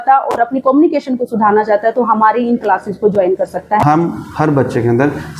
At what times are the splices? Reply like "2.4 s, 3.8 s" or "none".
3.8 s